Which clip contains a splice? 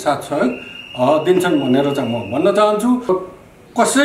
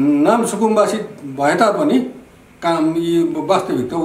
first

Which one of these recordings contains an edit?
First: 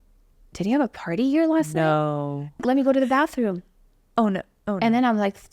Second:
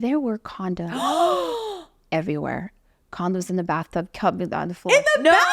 first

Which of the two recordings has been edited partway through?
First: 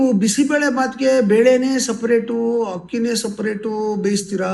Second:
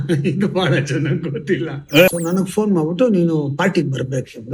second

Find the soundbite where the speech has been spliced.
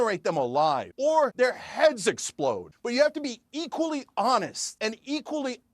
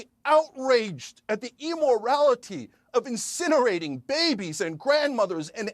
first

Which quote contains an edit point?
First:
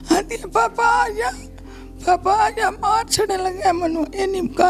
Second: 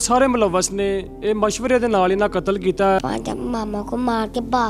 second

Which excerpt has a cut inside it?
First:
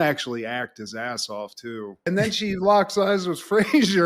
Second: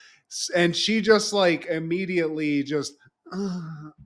first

